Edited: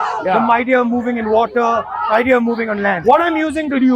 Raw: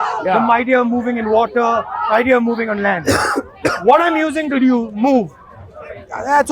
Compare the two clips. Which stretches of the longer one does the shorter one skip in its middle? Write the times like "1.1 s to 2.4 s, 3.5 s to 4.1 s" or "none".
3.0 s to 3.8 s

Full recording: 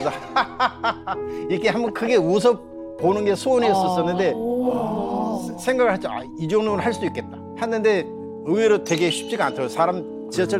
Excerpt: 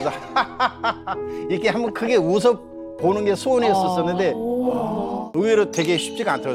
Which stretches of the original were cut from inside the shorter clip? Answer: 5.2 s to 8.3 s

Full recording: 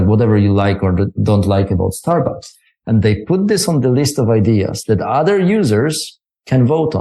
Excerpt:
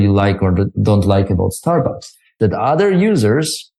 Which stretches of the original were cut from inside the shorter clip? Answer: 2.7 s to 4.8 s

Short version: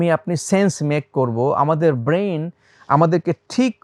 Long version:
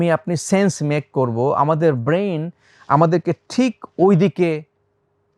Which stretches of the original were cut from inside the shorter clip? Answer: none

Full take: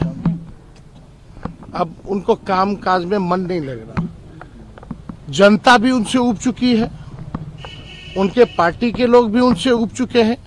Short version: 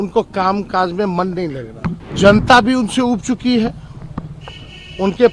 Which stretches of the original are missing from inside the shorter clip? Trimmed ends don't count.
4.2 s to 5.2 s

